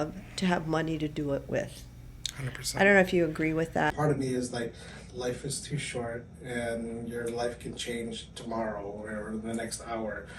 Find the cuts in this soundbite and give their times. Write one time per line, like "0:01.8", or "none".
0:03.9